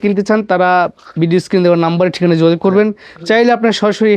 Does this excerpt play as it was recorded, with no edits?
yes; 0 cuts

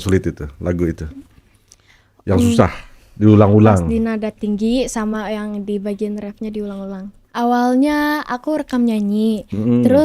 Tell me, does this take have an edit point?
yes; 1 cut; at 7.2 s

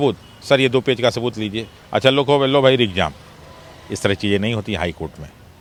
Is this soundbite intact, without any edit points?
yes; 0 cuts

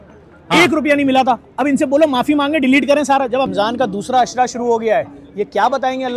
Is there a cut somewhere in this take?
yes; 1 cut; at 3.5 s

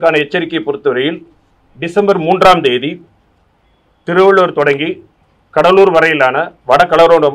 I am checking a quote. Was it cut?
no; 0 cuts

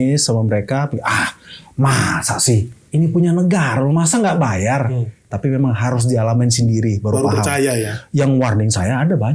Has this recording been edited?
no; 0 cuts

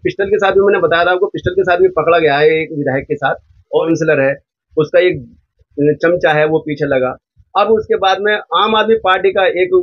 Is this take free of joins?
no; 1 cut; at 3.8 s

